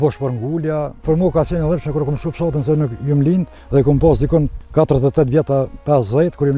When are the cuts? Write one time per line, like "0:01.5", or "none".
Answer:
0:01.0
0:03.6
0:04.6